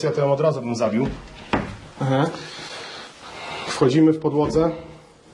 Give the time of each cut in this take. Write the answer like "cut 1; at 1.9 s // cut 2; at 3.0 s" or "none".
none